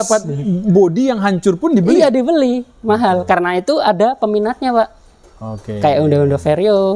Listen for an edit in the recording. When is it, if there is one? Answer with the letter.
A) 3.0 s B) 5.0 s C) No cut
C